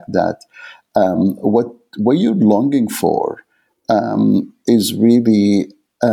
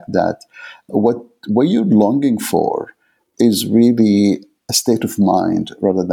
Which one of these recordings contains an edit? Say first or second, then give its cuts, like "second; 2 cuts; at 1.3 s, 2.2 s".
second; 3 cuts; at 0.9 s, 3.2 s, 4.6 s